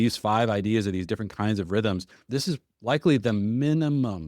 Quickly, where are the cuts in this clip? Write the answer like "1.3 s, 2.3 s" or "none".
2.3 s